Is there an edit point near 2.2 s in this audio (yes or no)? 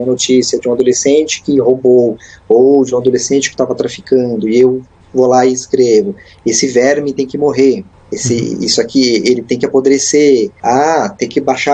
no